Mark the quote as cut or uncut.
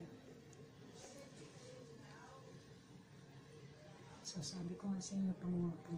uncut